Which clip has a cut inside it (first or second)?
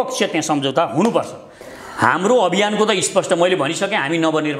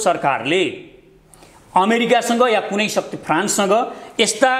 first